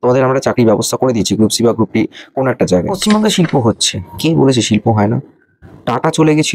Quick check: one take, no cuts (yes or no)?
no